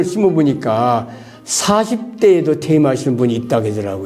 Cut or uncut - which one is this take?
uncut